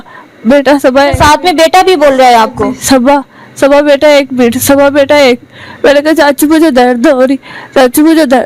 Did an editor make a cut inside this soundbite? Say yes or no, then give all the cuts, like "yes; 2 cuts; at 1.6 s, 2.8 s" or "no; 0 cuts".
no; 0 cuts